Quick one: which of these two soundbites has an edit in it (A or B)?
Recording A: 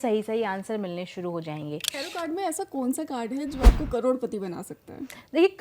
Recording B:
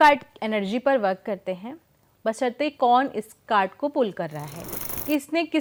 A